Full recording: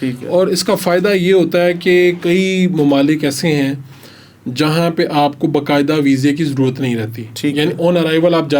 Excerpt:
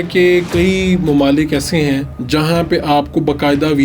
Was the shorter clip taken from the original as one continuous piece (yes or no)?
no